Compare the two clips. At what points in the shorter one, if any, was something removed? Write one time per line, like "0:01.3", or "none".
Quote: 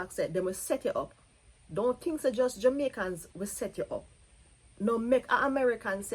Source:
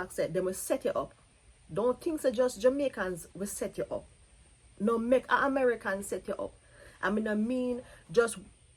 none